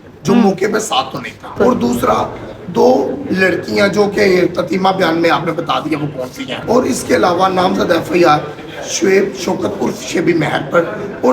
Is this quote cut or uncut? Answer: cut